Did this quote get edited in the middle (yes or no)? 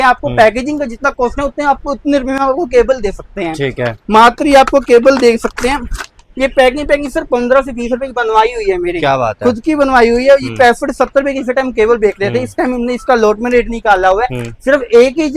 no